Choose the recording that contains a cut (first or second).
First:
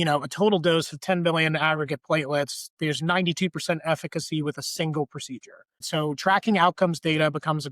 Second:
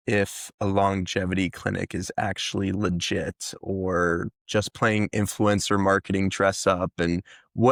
first